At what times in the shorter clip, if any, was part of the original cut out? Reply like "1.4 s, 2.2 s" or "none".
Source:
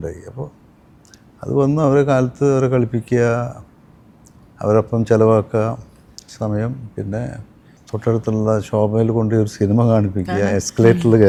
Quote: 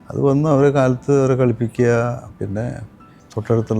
2.3 s